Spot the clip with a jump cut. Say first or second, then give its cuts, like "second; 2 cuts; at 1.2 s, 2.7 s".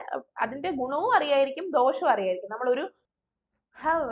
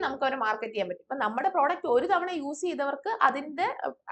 first; 1 cut; at 3.0 s